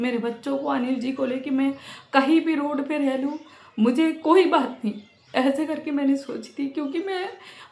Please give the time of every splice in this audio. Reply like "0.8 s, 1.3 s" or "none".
none